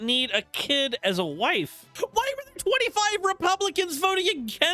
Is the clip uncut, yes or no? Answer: no